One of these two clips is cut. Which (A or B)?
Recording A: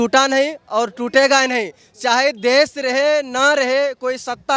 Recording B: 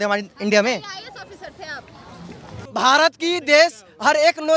B